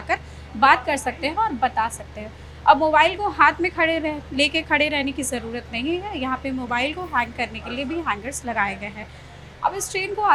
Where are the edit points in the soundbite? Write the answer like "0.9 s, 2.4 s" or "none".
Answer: none